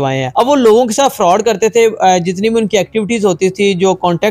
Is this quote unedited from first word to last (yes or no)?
yes